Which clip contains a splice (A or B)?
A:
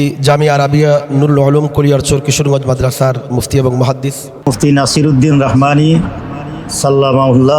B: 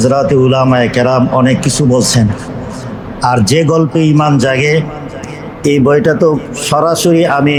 A